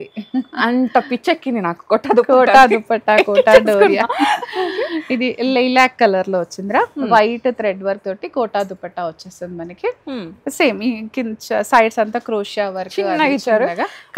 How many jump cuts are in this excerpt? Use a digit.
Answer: 0